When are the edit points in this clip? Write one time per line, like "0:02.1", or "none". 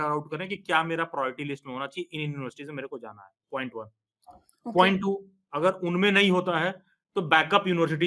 none